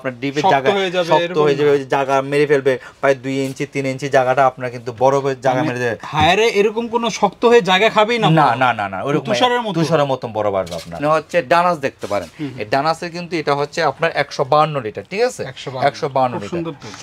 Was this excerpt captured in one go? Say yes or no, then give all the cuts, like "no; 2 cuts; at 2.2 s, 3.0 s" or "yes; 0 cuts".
no; 1 cut; at 11.0 s